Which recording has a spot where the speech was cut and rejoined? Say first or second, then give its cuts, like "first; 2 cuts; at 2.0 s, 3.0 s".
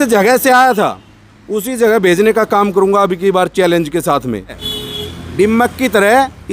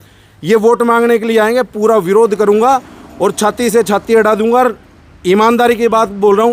first; 1 cut; at 4.7 s